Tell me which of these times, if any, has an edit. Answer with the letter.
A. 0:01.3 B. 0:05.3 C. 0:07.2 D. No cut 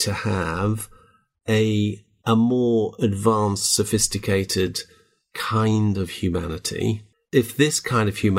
C